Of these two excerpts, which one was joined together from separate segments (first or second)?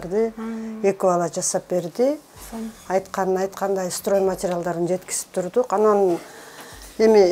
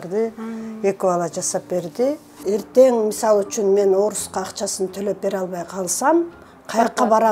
second